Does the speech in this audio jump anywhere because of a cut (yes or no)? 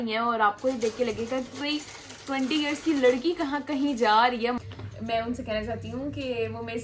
yes